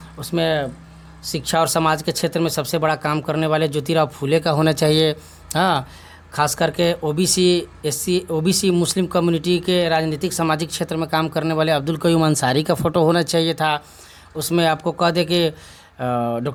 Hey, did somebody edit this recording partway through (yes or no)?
no